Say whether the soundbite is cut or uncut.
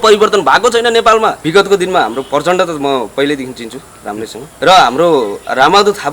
cut